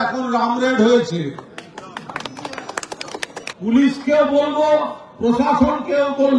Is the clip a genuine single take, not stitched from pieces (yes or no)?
no